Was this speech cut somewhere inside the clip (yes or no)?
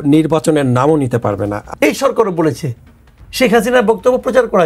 yes